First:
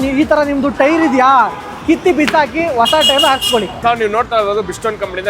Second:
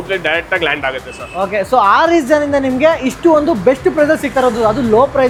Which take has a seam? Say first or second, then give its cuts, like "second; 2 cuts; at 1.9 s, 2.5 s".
first; 1 cut; at 3.7 s